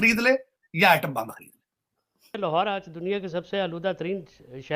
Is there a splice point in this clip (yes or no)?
yes